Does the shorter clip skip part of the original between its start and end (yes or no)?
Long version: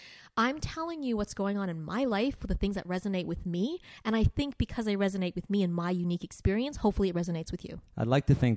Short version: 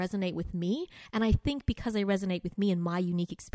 no